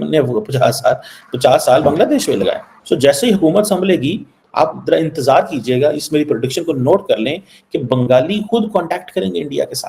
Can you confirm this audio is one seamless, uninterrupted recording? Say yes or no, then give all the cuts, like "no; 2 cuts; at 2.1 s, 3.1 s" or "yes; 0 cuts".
no; 1 cut; at 2.7 s